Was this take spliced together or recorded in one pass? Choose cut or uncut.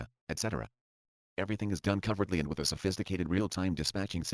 cut